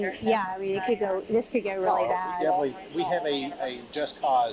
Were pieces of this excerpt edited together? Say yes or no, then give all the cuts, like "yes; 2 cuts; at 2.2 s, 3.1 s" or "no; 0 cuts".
no; 0 cuts